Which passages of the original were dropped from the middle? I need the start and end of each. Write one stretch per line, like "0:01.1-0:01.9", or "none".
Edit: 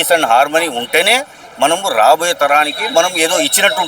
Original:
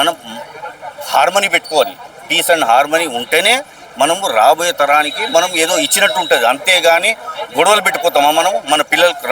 none